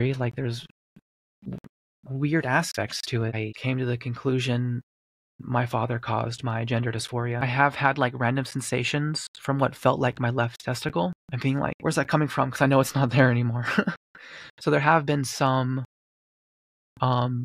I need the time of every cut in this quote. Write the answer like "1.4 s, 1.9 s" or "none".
3.5 s, 7.4 s, 11.8 s